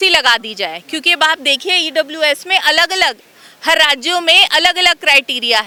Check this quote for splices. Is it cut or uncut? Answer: uncut